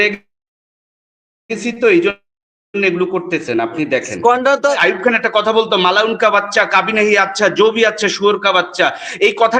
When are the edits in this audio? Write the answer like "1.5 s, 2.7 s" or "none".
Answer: 4.8 s